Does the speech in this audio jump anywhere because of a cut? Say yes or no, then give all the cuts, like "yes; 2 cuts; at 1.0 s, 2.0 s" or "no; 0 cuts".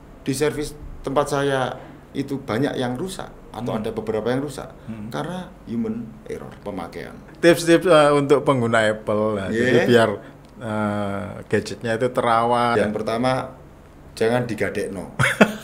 yes; 2 cuts; at 7.3 s, 12.8 s